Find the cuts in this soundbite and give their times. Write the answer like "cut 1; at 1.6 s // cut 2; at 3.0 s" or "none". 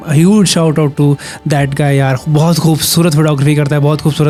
none

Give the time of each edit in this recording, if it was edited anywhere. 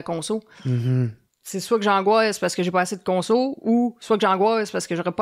cut 1; at 1.2 s

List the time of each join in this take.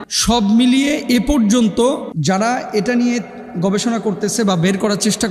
none

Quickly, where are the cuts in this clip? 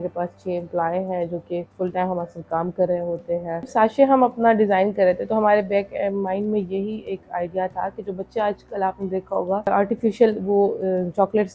cut 1; at 1.7 s // cut 2; at 3.7 s // cut 3; at 9.7 s

